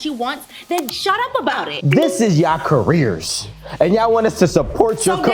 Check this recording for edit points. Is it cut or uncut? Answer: cut